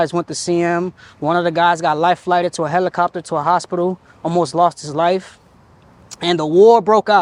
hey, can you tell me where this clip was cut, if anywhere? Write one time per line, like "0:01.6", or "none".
none